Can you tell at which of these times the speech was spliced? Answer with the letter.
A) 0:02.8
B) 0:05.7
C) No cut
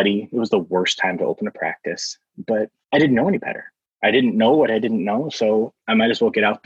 A